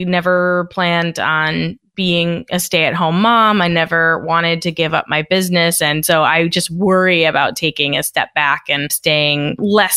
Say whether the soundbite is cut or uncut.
uncut